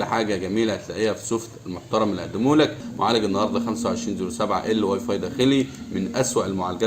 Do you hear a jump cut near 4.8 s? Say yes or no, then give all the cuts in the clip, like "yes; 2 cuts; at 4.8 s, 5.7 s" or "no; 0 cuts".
no; 1 cut; at 2.9 s